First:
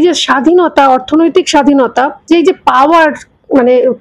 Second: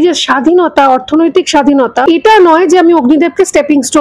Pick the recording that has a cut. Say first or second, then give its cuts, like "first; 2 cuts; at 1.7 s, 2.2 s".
second; 1 cut; at 2.0 s